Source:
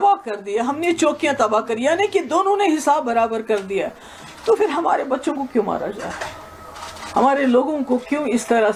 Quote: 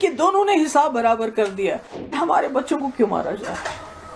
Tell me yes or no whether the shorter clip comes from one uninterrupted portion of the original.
no